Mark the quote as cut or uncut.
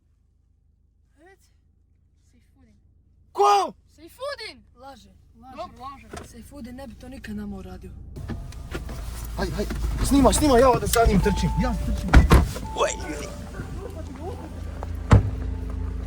cut